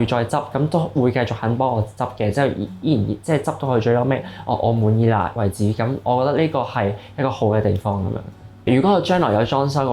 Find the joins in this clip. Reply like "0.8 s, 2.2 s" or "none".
8.7 s